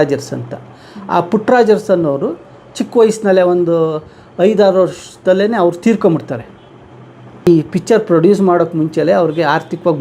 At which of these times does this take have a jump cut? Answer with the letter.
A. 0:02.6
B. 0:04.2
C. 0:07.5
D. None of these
C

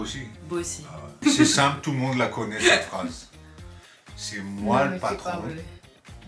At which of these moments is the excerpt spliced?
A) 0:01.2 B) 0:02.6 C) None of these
A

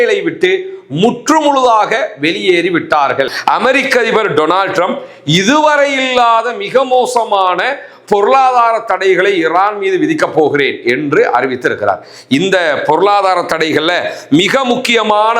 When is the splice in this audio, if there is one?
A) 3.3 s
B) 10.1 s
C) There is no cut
A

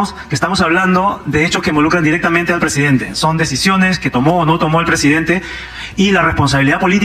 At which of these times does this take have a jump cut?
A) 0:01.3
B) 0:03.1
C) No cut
C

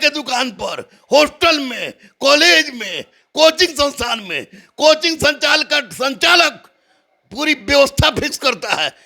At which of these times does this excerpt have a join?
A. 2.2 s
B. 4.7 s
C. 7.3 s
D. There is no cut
D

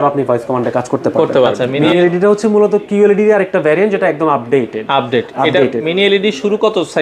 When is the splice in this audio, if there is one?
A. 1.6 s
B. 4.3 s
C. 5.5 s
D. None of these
A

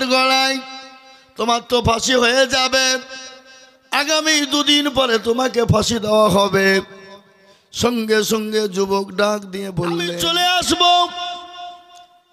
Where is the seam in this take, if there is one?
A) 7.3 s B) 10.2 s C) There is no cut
B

